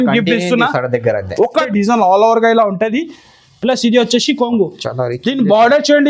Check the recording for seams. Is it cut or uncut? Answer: cut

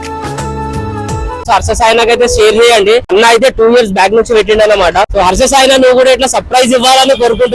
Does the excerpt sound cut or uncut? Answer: cut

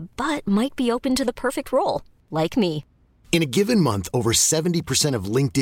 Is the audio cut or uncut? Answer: uncut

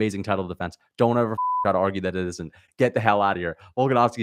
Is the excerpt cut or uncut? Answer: uncut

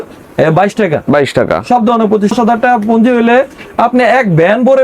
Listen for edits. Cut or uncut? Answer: cut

